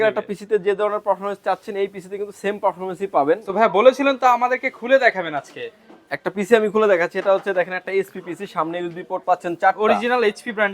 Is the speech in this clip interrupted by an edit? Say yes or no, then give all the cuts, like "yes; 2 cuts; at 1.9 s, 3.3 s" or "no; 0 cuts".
no; 0 cuts